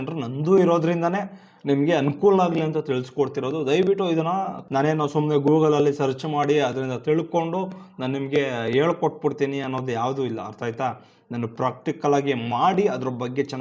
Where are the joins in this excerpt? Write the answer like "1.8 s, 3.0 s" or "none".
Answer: 4.6 s